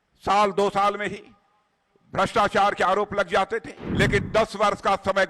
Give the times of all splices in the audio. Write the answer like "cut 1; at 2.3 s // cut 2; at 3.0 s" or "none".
cut 1; at 3.8 s